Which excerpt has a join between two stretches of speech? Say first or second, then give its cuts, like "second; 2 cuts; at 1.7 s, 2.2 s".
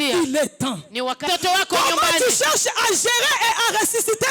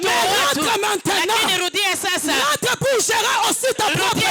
first; 1 cut; at 1.2 s